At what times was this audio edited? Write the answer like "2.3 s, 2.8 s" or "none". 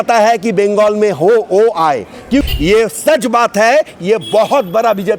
2.4 s